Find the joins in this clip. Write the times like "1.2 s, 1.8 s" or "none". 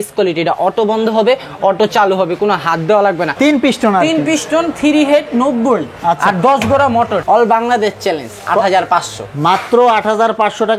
3.3 s, 7.2 s